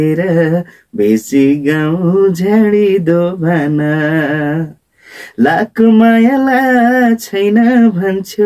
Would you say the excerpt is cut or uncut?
uncut